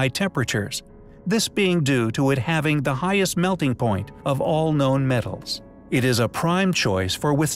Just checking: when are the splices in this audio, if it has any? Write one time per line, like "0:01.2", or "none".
none